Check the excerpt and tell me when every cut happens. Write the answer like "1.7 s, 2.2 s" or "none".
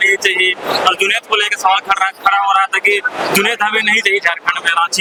none